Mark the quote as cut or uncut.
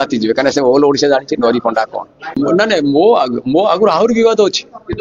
cut